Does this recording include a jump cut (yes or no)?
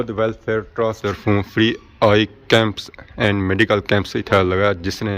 yes